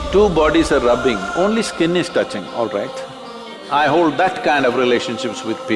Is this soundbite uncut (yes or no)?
no